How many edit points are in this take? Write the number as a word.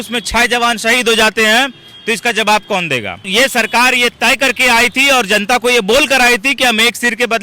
one